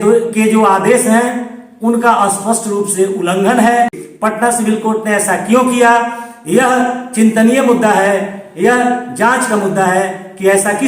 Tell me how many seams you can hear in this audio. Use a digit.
1